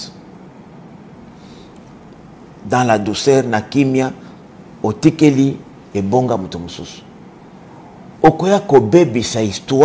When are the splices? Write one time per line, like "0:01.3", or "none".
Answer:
none